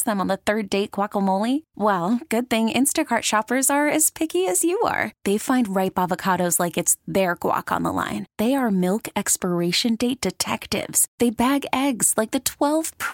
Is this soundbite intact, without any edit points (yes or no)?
yes